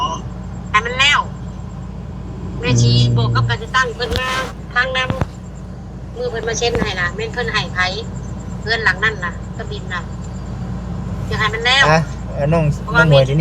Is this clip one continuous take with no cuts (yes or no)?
no